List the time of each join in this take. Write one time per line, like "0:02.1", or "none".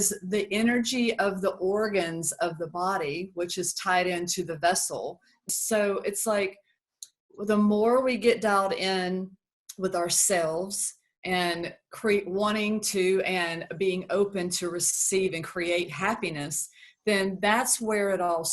0:05.5